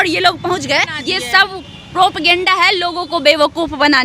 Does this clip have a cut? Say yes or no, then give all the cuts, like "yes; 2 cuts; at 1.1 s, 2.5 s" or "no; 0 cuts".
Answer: yes; 1 cut; at 1.0 s